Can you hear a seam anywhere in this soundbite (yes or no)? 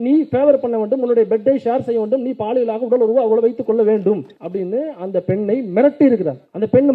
no